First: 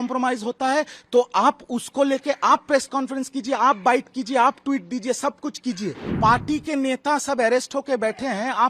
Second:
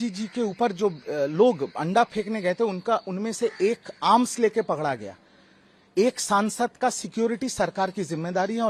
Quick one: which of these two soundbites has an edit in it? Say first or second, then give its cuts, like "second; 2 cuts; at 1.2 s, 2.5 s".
first; 1 cut; at 6.0 s